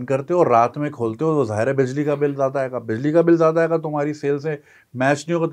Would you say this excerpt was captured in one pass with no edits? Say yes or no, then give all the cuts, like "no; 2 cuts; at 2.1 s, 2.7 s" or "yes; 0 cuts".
yes; 0 cuts